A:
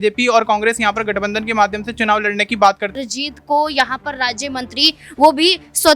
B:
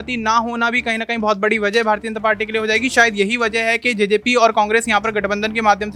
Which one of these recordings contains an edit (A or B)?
A